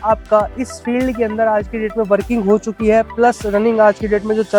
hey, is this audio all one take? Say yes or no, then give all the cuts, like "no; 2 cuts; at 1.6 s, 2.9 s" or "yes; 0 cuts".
yes; 0 cuts